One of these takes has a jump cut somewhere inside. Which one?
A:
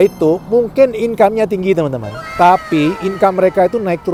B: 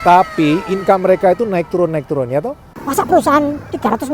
B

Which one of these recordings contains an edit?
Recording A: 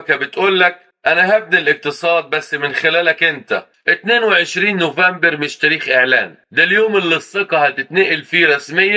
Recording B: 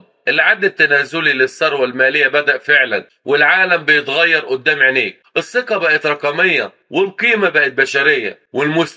A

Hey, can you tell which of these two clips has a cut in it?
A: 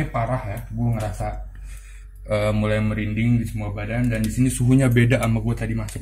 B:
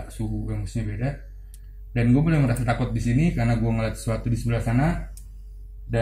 B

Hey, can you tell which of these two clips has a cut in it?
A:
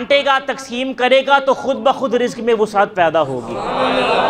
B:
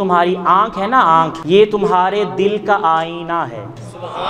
B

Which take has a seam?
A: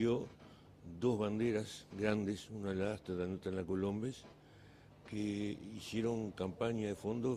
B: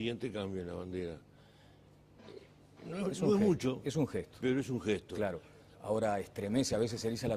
A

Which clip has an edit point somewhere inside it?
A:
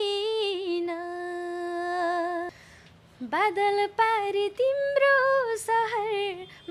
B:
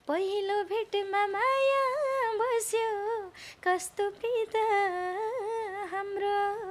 A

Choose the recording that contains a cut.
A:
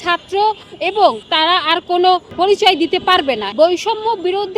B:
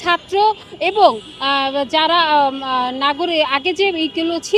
A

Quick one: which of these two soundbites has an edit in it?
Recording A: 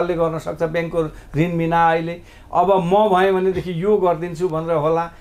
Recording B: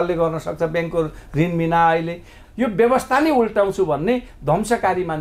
B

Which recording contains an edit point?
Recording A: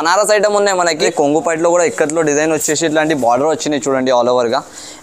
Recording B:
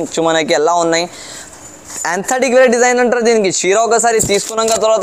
A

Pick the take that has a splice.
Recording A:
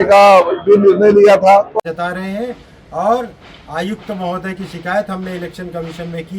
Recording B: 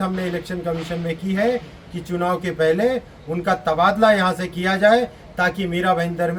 A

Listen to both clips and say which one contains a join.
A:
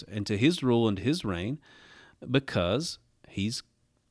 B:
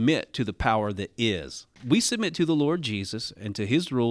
B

